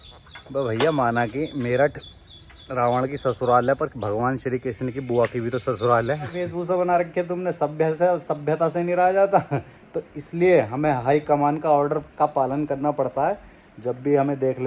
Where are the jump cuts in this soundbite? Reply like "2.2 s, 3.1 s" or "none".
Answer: 6.5 s